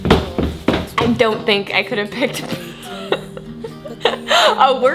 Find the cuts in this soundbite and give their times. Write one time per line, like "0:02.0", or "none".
0:01.0